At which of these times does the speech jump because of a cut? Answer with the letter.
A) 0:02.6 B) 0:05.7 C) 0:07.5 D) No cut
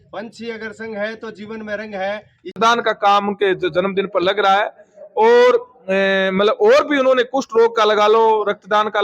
A